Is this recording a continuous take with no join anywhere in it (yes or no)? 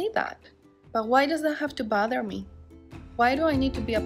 no